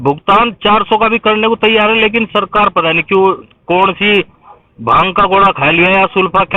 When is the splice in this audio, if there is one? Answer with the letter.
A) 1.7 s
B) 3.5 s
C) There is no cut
B